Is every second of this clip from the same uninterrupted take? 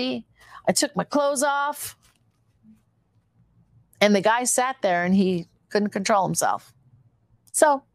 yes; 0 cuts

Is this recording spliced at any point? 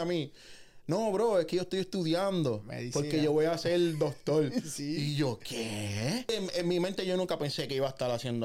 yes; 1 cut; at 6.3 s

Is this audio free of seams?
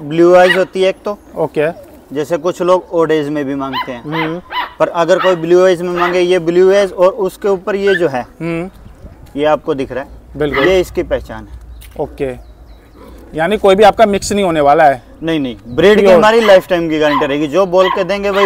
yes; 0 cuts

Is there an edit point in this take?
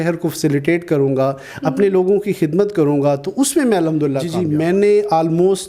yes; 1 cut; at 4.3 s

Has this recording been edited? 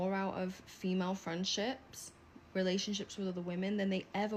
no; 0 cuts

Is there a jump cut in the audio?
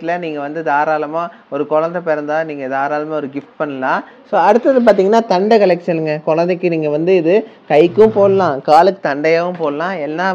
yes; 1 cut; at 4.2 s

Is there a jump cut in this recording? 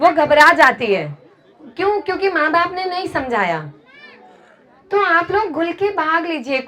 no; 0 cuts

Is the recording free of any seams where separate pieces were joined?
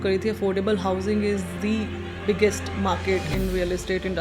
yes; 0 cuts

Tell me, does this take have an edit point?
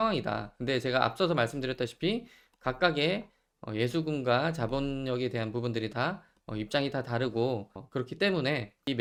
no; 0 cuts

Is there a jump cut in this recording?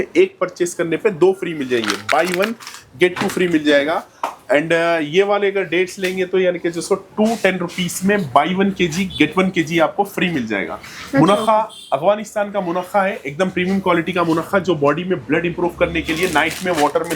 no; 0 cuts

